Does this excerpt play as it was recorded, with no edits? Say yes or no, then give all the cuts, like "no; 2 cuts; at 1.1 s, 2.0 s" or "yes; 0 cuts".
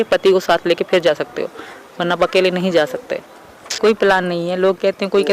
no; 1 cut; at 3.7 s